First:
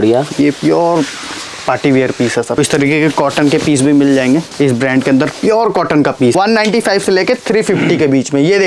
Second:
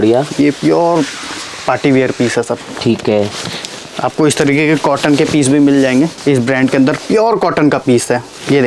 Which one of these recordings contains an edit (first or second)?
first